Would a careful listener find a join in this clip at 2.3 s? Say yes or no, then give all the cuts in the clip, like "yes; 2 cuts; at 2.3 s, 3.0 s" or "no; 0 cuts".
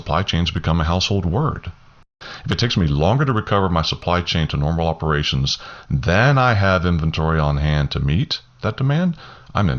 yes; 1 cut; at 2.3 s